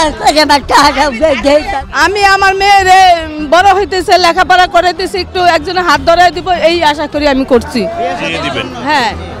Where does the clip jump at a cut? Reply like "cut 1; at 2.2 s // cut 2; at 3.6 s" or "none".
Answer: cut 1; at 1.8 s